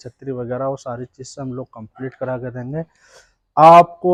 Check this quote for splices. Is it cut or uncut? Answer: uncut